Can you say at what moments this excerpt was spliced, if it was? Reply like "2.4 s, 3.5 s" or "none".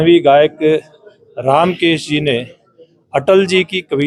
none